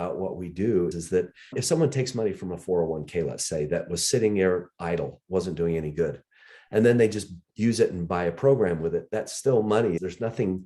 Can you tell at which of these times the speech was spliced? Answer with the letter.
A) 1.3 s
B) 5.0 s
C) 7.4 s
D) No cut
D